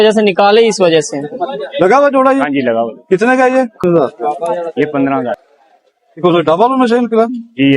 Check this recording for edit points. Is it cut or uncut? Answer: cut